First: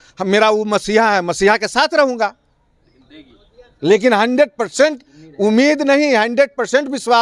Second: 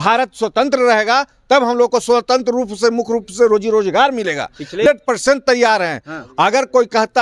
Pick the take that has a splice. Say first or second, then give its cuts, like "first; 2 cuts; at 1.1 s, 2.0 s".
second; 1 cut; at 4.9 s